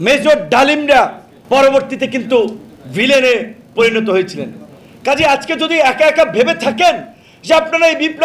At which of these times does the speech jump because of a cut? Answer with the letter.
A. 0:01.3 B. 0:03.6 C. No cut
A